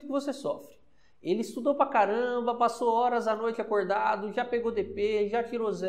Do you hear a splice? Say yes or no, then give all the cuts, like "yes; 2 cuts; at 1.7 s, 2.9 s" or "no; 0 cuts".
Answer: no; 0 cuts